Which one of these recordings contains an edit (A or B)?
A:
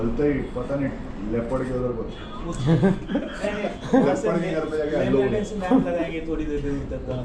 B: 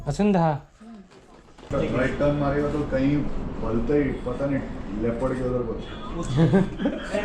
B